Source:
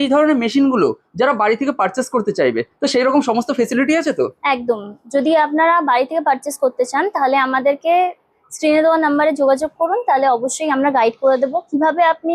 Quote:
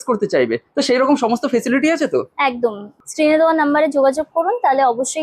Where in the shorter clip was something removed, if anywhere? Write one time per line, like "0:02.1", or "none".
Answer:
0:02.9

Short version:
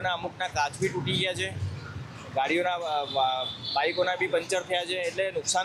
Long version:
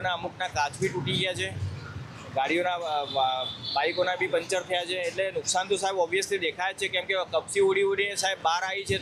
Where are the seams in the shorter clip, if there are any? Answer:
none

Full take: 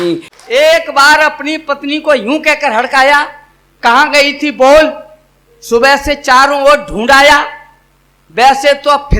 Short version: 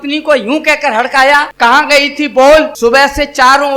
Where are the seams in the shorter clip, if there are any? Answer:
0:01.5
0:02.7

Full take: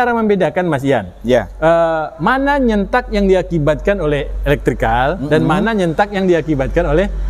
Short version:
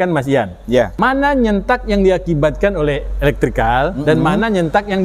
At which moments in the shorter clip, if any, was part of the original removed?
0:00.9

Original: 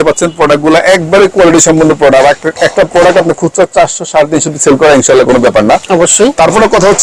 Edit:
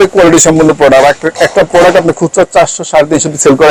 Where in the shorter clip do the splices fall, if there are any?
none

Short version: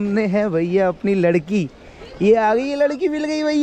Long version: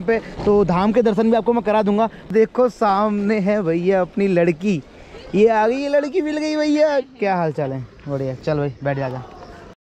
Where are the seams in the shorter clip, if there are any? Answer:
none

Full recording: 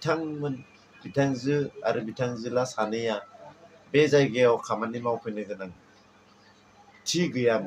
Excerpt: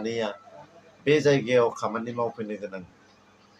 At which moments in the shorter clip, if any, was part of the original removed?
none

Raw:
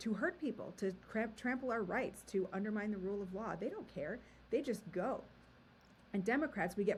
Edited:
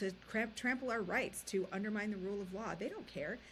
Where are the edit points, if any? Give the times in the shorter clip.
none

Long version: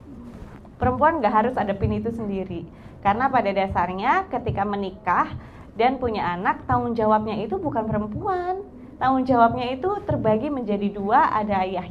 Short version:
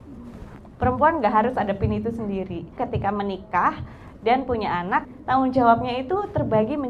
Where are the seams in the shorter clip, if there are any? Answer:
0:02.8
0:05.1

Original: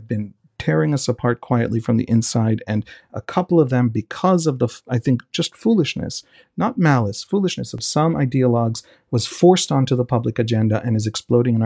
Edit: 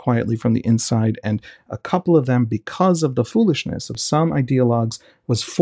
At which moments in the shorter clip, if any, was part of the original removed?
0:03.6

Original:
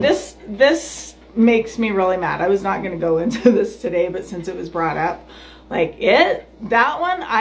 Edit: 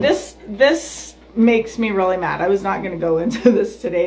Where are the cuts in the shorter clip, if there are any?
none

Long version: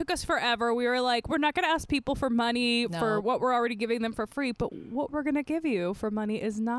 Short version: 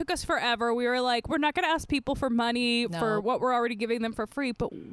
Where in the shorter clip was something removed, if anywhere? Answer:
none

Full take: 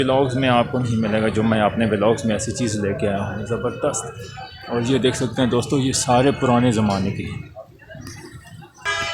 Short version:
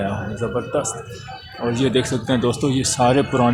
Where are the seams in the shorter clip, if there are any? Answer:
none

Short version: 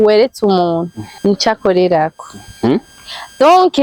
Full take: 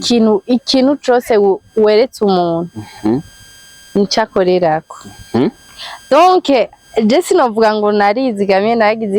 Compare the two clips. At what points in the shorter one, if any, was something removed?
0:01.0

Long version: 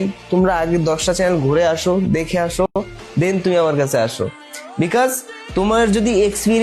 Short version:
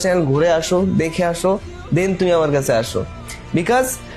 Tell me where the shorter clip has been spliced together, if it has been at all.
0:01.5

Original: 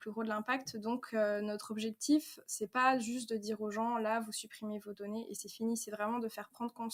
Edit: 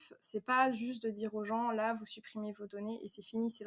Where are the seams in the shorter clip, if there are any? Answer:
none

